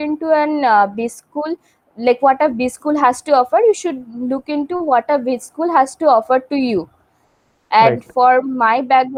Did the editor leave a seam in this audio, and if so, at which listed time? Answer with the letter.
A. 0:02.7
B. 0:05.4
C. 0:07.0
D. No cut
D